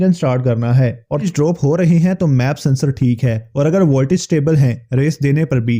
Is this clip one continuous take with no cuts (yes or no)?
no